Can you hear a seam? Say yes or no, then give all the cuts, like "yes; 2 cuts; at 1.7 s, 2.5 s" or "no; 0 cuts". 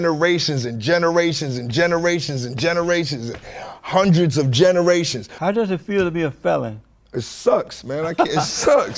yes; 1 cut; at 5.3 s